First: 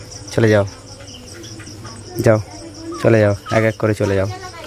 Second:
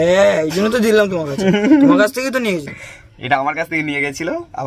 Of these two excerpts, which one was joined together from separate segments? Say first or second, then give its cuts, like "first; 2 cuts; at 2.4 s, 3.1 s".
first; 1 cut; at 2.1 s